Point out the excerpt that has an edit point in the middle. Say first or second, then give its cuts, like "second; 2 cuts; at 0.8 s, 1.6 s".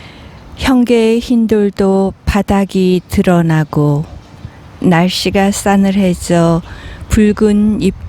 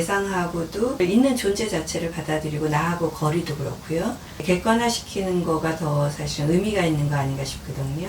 second; 2 cuts; at 1.0 s, 4.4 s